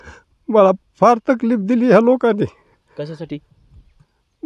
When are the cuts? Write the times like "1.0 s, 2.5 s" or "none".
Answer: none